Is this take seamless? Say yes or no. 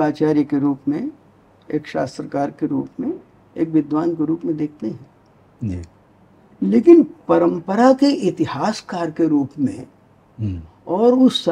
yes